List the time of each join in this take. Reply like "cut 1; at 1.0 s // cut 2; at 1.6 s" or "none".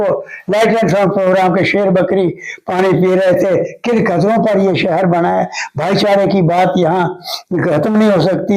none